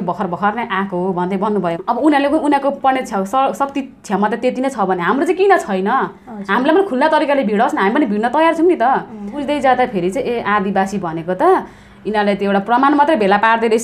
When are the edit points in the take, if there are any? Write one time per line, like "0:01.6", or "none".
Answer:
0:01.8
0:09.4